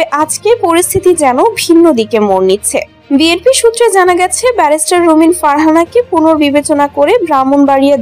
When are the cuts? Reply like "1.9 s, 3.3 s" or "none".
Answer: none